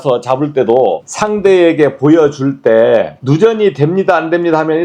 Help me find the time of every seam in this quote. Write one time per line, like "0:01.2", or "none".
0:01.1
0:03.2